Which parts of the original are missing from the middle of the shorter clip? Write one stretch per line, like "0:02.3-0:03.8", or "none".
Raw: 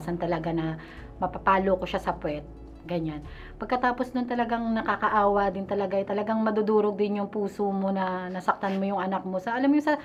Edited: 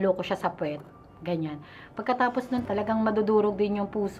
0:04.3-0:06.1